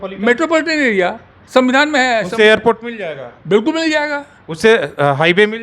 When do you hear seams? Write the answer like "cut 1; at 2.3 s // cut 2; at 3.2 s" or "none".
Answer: none

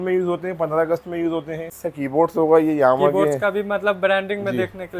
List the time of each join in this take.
cut 1; at 1.8 s

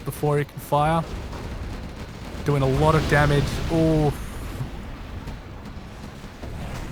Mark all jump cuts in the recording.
cut 1; at 4.7 s

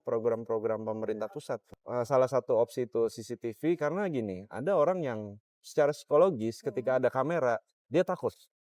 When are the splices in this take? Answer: cut 1; at 1.8 s

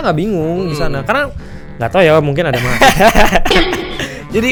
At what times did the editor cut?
none

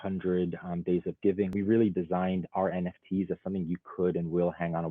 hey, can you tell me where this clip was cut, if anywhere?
cut 1; at 1.5 s

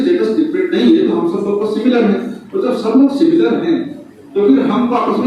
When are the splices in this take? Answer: none

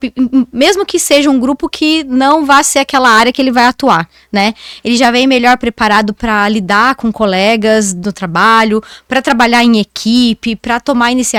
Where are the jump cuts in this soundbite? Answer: none

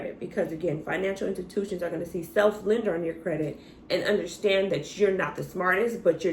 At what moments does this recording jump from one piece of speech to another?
none

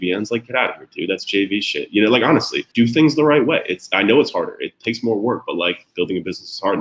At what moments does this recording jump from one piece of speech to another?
cut 1; at 2.6 s

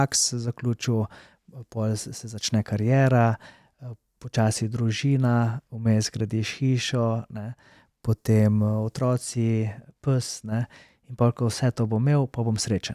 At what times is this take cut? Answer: none

